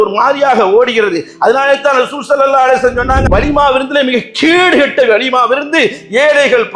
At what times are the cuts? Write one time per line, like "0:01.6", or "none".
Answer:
0:03.2